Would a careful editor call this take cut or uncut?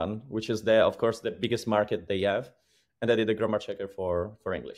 uncut